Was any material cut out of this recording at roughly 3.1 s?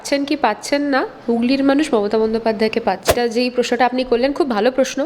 yes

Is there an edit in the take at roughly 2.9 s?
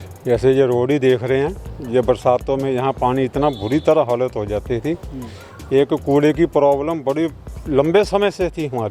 no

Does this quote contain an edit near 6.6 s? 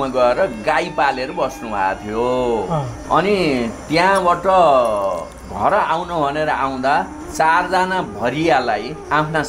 no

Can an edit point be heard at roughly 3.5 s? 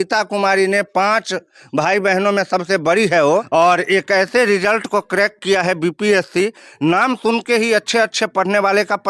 yes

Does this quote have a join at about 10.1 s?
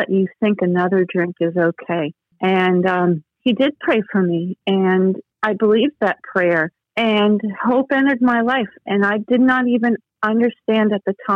no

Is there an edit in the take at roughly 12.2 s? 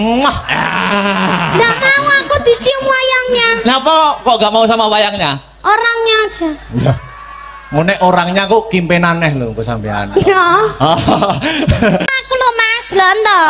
yes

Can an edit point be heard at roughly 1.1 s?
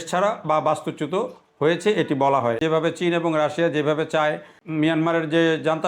no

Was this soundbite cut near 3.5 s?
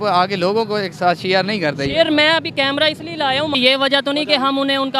yes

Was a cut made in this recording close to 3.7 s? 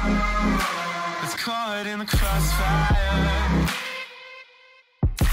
no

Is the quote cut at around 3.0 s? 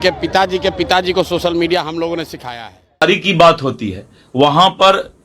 yes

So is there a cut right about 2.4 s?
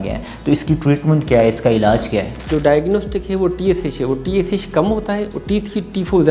yes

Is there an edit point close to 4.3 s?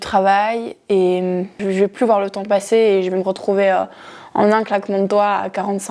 no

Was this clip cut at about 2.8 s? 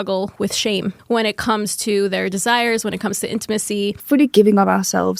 no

